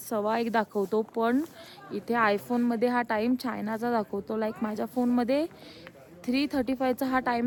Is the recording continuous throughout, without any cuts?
yes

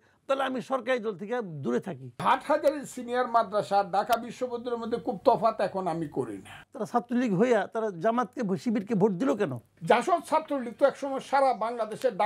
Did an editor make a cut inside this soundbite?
yes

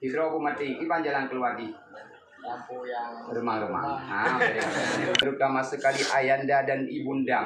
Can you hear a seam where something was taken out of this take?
yes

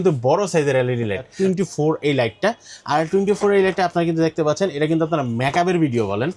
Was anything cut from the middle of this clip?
yes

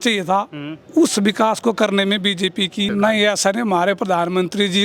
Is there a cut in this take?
yes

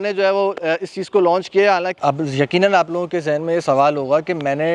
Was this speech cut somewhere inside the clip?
yes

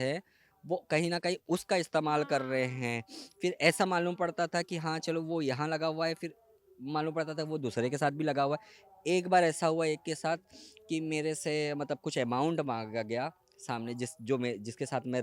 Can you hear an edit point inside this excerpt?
no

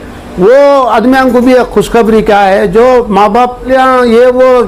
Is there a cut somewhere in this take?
yes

